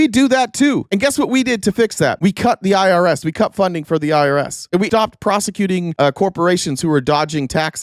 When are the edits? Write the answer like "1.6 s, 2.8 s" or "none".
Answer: 4.8 s